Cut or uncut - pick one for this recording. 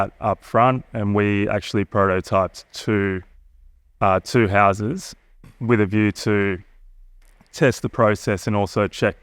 uncut